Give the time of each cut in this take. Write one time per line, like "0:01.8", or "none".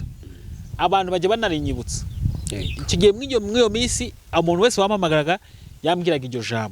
none